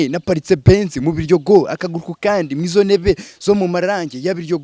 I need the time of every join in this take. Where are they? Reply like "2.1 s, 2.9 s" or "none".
none